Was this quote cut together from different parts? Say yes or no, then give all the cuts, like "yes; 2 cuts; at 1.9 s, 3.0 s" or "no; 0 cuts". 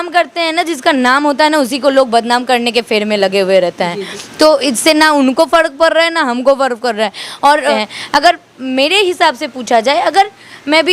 yes; 1 cut; at 7.7 s